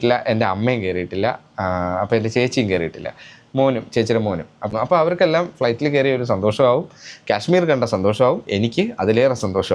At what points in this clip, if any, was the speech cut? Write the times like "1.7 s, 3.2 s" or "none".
4.6 s